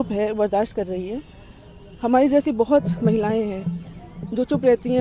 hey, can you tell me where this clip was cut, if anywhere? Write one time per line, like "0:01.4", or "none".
none